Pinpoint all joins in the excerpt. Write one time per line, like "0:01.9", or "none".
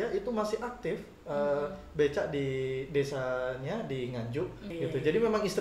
0:04.6